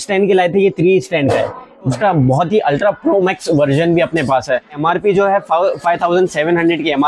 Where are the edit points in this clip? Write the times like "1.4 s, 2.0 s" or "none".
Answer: 1.9 s, 4.8 s